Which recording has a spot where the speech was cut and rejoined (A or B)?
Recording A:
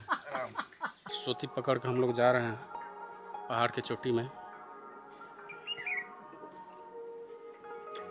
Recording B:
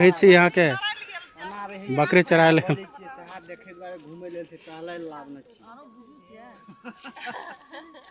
A